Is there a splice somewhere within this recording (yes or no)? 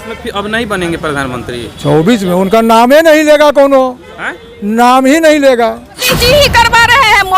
yes